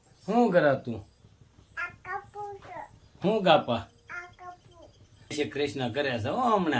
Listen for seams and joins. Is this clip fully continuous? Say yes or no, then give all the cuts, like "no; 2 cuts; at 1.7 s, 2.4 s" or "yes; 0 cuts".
no; 1 cut; at 5.3 s